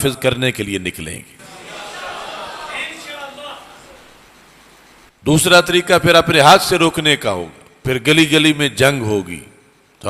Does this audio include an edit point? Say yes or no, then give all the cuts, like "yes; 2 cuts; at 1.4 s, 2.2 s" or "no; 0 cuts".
no; 0 cuts